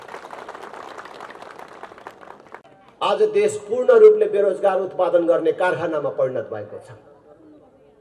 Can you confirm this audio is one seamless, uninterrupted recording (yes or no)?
no